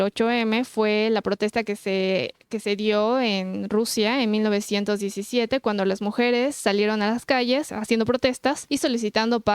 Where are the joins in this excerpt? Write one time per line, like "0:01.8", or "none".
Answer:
0:07.7
0:08.6